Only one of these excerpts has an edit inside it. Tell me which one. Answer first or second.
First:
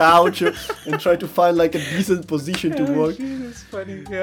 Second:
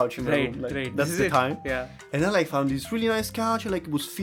second